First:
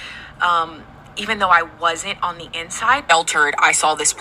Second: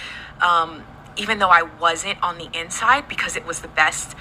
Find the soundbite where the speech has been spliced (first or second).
first